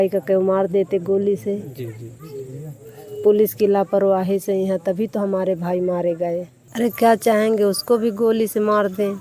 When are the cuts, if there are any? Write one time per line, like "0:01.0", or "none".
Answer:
0:06.6